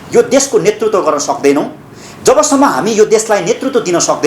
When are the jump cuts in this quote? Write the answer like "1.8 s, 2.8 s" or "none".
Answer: none